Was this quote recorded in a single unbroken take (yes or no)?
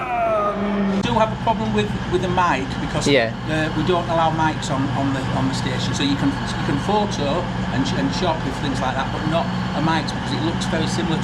no